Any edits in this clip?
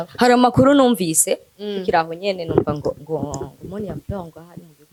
no; 0 cuts

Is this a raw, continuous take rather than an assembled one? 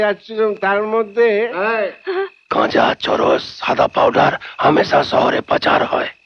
no; 1 cut; at 2.4 s

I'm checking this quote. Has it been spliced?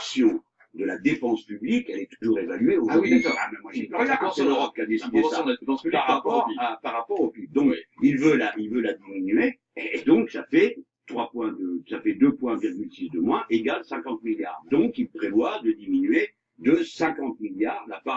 yes; 1 cut; at 13.8 s

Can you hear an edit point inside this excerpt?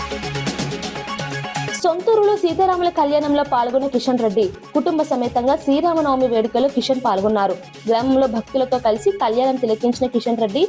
yes; 1 cut; at 1.7 s

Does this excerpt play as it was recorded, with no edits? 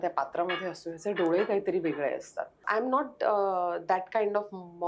no; 1 cut; at 2.6 s

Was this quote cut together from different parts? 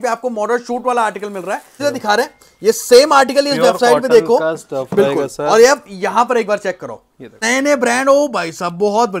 yes; 2 cuts; at 1.7 s, 7.4 s

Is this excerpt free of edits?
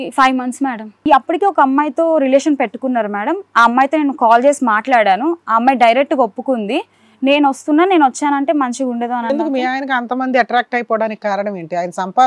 no; 1 cut; at 1.0 s

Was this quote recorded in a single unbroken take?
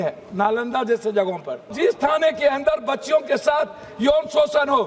no; 1 cut; at 1.7 s

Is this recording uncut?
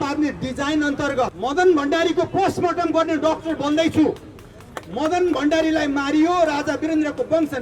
no; 1 cut; at 1.3 s

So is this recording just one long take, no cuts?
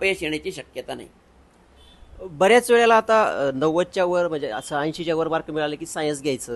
yes; 0 cuts

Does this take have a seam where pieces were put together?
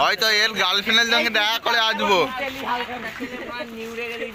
no; 0 cuts

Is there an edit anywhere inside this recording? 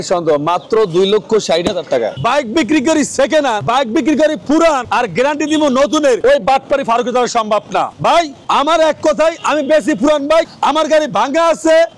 yes; 5 cuts; at 2.1 s, 3.6 s, 4.9 s, 6.2 s, 8.2 s

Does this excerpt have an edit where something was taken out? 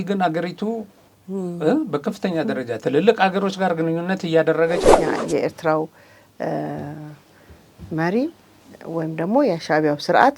yes; 1 cut; at 5.0 s

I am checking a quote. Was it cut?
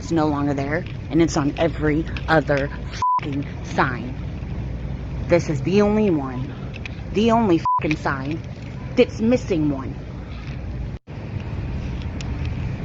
no; 0 cuts

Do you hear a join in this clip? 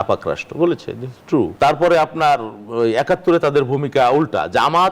yes; 1 cut; at 1.5 s

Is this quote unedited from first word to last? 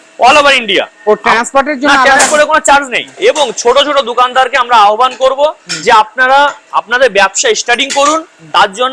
no; 1 cut; at 3.0 s

